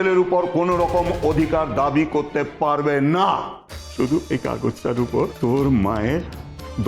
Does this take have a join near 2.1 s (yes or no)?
no